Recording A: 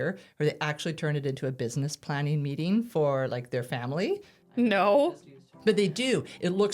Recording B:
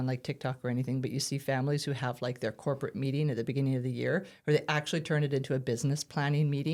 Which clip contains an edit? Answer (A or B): A